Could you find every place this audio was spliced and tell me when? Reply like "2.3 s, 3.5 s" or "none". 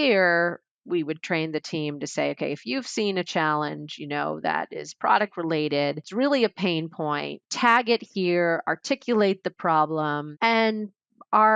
6.0 s, 7.4 s, 10.3 s